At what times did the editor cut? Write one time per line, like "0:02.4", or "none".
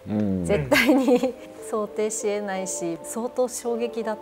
0:01.6
0:02.9